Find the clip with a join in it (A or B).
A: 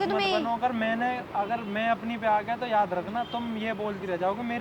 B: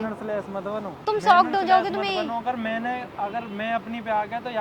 B